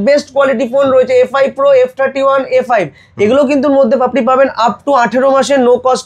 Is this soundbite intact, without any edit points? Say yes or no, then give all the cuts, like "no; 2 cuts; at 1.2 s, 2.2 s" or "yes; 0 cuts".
yes; 0 cuts